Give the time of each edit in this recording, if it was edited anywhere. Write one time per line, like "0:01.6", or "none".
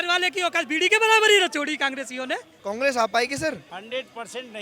0:02.5
0:03.7